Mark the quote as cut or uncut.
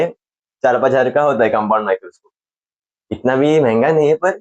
uncut